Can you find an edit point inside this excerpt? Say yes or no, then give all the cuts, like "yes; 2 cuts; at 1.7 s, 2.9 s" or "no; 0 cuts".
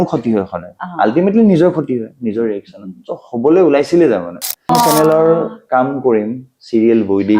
yes; 1 cut; at 4.7 s